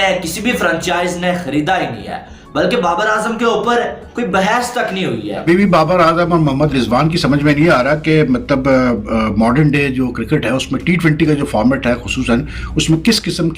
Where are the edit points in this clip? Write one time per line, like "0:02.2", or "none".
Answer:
0:05.4